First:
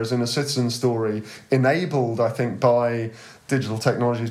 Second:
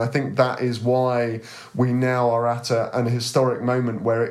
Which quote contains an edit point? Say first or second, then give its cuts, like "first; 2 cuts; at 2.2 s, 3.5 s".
first; 1 cut; at 3.4 s